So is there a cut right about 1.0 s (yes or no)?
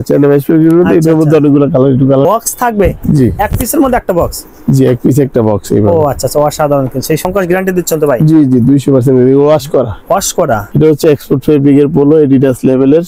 no